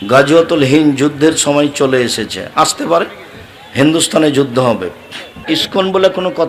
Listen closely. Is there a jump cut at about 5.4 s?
yes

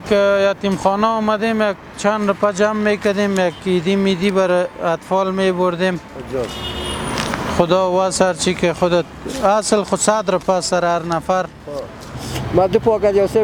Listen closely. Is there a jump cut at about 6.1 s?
no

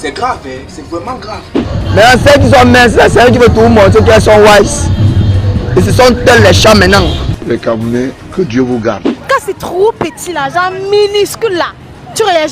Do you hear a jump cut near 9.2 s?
yes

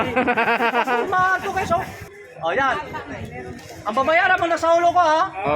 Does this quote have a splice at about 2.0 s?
yes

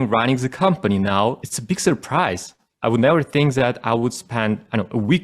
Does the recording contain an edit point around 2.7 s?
no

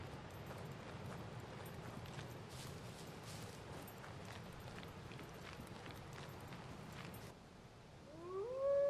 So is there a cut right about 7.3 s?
yes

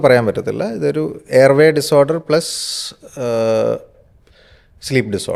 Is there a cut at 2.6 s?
no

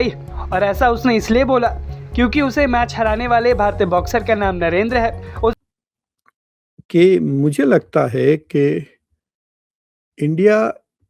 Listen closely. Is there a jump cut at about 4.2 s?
no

